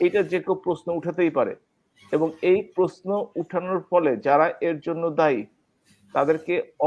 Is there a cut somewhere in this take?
no; 0 cuts

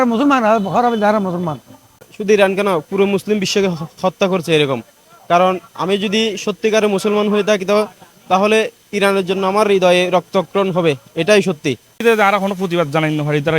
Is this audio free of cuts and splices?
no; 2 cuts; at 2.1 s, 12.0 s

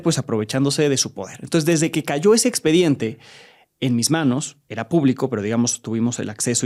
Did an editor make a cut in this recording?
no; 0 cuts

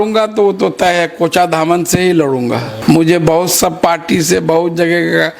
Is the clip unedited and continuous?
no; 1 cut; at 2.7 s

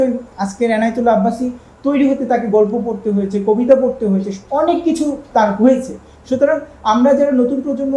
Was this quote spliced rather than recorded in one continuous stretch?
no; 0 cuts

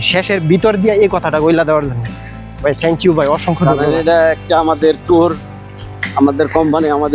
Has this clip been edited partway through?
no; 0 cuts

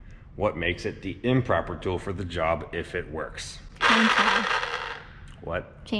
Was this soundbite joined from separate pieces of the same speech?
no; 0 cuts

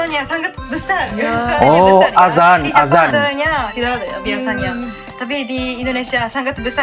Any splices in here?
no; 0 cuts

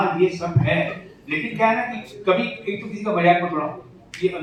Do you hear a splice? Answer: no; 0 cuts

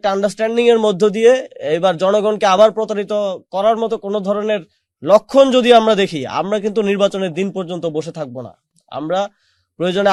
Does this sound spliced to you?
no; 0 cuts

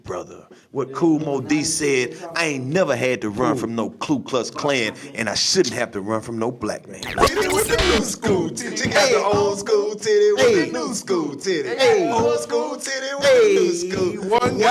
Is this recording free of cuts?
no; 1 cut; at 7.2 s

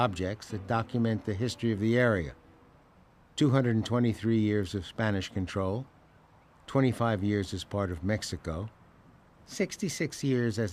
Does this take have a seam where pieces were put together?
yes; 1 cut; at 4.7 s

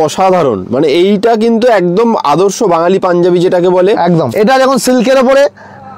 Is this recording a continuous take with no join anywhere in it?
no; 1 cut; at 4.3 s

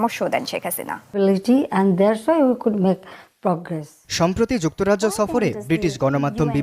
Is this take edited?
yes; 1 cut; at 1.0 s

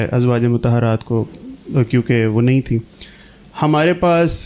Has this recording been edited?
no; 0 cuts

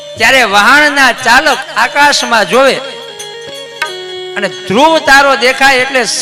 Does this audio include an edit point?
no; 0 cuts

